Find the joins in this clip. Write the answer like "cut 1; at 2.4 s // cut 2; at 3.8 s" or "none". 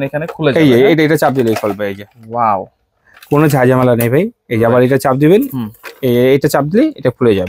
none